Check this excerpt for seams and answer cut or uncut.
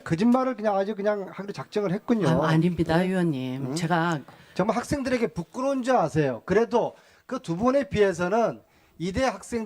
cut